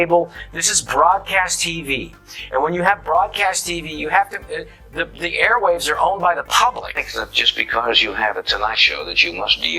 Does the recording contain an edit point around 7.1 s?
yes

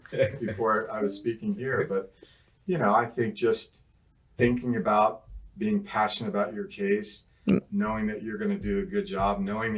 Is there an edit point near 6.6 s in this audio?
no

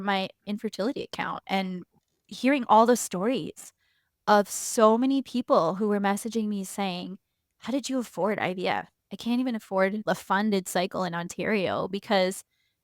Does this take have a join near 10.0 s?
yes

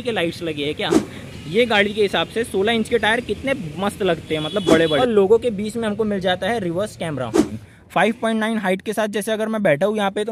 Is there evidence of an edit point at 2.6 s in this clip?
no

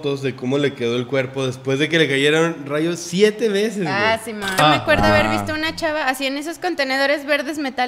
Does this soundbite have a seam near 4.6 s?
yes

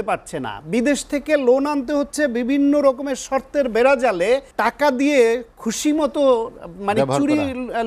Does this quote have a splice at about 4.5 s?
yes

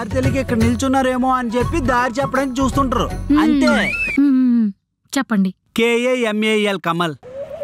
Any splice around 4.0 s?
yes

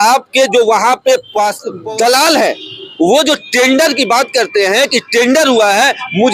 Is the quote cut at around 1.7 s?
yes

